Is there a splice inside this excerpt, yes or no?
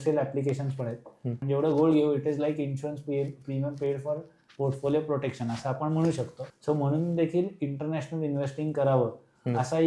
yes